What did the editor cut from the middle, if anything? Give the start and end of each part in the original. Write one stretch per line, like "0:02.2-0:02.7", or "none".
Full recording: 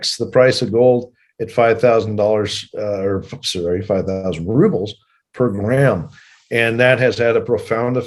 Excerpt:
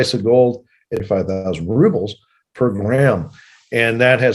0:01.5-0:03.8